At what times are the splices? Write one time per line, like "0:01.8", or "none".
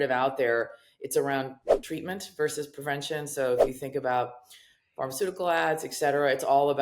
0:01.7